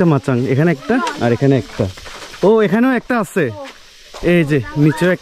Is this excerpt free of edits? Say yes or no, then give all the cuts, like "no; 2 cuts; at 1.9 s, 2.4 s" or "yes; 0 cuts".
yes; 0 cuts